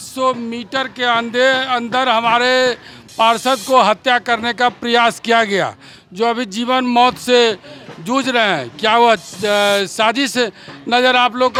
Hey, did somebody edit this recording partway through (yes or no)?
no